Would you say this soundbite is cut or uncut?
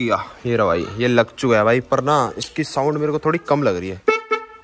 uncut